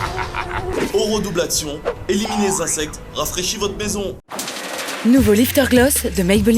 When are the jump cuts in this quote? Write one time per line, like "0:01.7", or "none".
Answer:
0:04.3